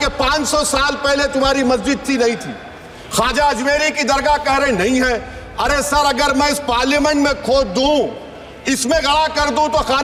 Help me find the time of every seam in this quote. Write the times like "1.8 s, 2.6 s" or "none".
none